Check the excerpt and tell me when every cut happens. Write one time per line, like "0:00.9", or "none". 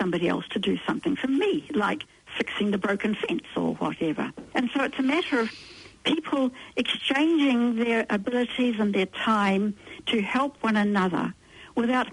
none